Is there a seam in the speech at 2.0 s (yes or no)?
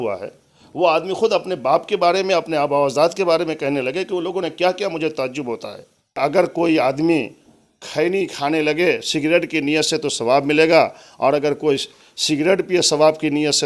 no